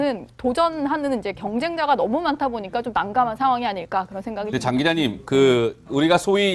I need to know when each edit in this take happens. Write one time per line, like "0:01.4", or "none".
0:02.1